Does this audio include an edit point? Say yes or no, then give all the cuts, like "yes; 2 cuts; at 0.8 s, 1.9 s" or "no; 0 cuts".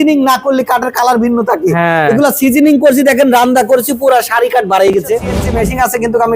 yes; 1 cut; at 5.3 s